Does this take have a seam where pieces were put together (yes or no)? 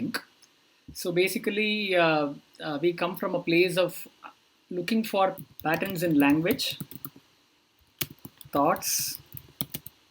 yes